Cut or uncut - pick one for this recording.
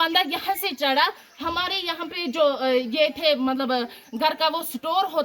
uncut